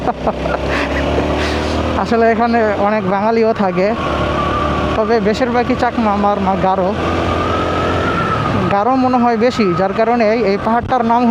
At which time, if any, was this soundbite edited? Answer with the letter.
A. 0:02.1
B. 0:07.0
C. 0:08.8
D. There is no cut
D